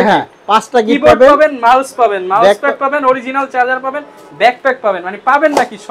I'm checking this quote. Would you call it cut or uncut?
uncut